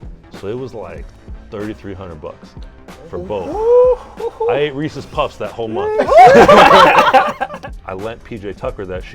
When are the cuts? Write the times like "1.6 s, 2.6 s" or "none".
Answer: 7.5 s